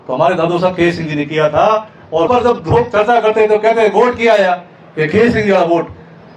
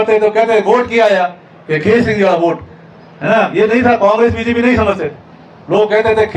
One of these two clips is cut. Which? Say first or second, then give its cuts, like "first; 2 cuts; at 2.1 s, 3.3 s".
first; 1 cut; at 2.3 s